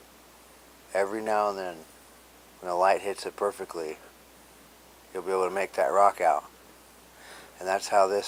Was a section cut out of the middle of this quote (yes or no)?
no